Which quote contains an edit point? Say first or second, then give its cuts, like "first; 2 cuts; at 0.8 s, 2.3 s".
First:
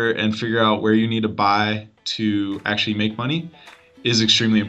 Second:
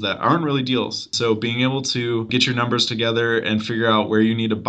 second; 2 cuts; at 1.0 s, 2.3 s